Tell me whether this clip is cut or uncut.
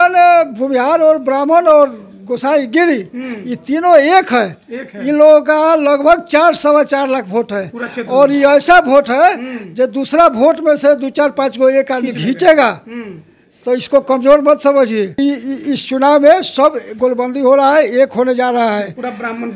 cut